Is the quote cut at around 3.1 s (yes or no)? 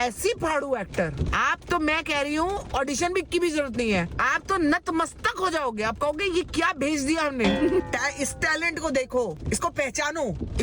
no